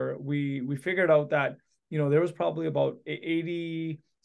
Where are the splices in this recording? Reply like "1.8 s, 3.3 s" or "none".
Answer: none